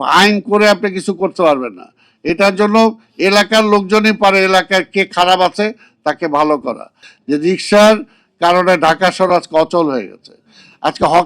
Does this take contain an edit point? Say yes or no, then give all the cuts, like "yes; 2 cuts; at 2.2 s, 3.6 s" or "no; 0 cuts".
yes; 1 cut; at 7.1 s